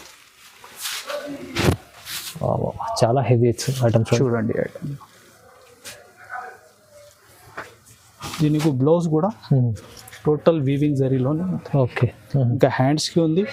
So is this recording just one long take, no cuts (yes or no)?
yes